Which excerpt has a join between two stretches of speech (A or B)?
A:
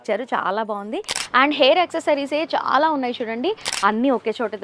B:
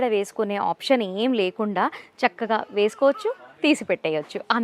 A